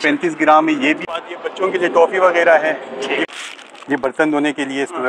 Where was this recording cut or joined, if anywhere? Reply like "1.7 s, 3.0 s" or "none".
1.0 s, 3.3 s